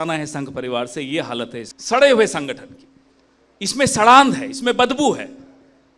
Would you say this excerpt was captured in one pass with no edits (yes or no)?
no